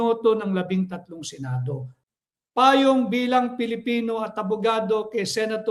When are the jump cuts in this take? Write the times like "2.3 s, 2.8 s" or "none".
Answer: 2.0 s